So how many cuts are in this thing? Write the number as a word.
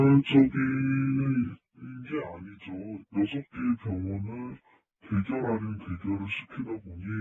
zero